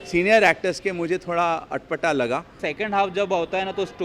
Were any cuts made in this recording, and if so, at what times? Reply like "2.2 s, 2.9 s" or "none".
2.6 s